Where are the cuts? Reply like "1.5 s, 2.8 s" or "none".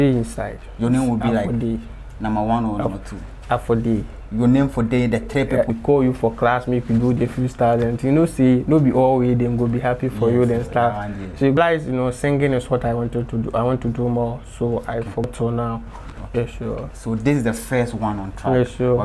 5.7 s, 11.6 s, 15.3 s